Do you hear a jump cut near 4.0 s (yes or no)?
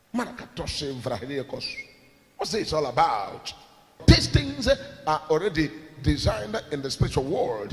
yes